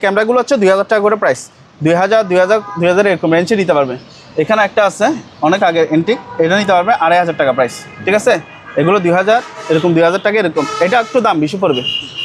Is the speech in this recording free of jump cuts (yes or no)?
yes